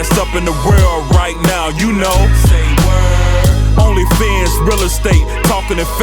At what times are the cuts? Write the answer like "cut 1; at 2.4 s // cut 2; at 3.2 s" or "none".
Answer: none